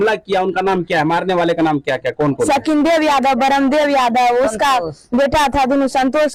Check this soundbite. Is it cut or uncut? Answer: uncut